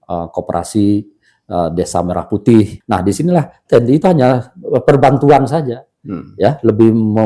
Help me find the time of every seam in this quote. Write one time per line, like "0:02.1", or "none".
0:02.8